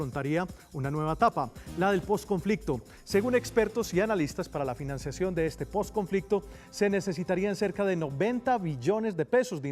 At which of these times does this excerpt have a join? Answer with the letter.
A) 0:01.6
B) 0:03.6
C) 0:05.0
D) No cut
C